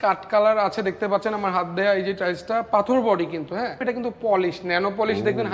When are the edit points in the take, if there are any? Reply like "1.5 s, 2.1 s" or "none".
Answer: 3.8 s